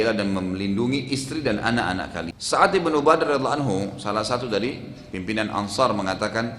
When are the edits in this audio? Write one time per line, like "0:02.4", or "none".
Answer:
0:02.4